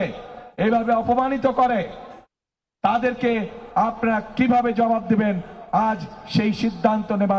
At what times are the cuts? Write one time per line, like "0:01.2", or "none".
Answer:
none